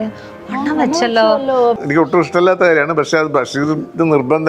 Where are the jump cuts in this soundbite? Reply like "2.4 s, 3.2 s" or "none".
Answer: 1.8 s